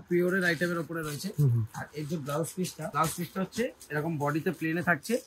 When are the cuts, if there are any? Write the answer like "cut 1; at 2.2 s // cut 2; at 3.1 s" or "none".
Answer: cut 1; at 1.8 s // cut 2; at 2.9 s